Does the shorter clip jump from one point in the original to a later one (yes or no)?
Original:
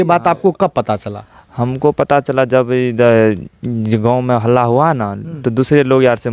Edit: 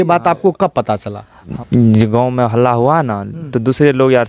yes